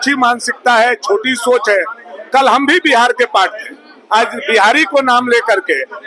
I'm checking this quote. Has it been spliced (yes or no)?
no